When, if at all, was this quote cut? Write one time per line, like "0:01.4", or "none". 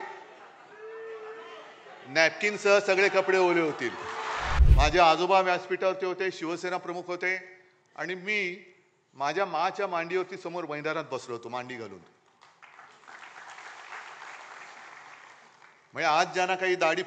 0:04.5